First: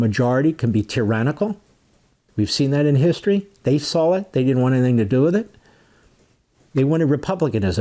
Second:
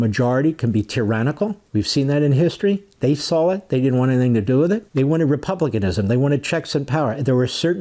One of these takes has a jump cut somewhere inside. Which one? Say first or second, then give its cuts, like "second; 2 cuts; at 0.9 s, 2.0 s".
second; 2 cuts; at 1.6 s, 4.9 s